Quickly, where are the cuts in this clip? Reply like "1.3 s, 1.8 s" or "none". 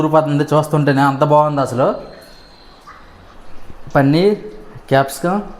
3.3 s